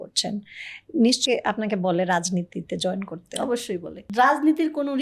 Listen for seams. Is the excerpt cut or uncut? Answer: cut